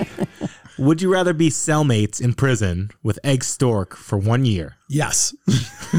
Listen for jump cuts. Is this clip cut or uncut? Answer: uncut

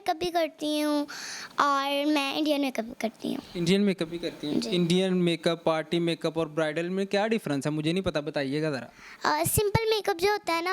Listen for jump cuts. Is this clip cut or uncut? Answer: uncut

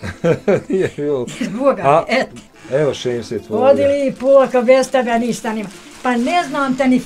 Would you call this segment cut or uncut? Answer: cut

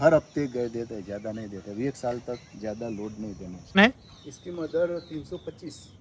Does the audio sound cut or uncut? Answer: cut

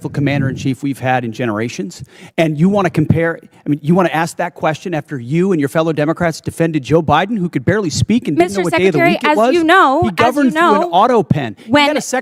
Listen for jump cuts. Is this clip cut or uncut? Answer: uncut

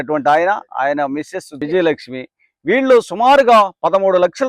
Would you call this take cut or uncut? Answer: cut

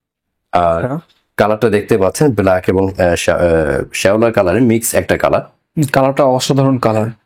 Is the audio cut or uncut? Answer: uncut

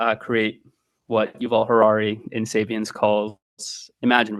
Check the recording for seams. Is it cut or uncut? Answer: uncut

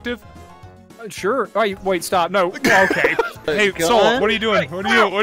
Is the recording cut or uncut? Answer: cut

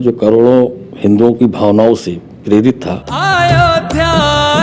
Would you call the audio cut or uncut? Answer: cut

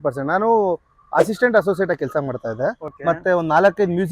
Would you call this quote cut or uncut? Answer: cut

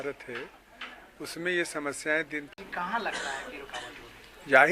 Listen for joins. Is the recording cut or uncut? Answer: cut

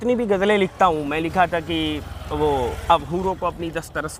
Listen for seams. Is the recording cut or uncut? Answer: uncut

